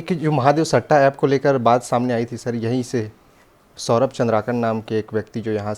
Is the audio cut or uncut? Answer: uncut